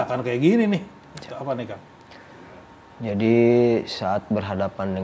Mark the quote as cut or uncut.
uncut